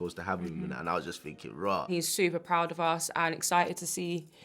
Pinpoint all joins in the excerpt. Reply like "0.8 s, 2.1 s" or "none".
1.9 s